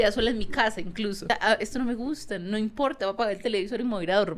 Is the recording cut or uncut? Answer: cut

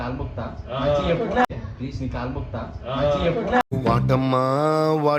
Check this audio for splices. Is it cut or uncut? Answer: uncut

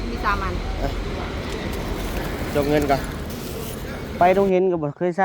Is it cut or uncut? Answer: cut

